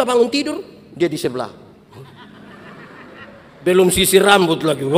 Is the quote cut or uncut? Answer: uncut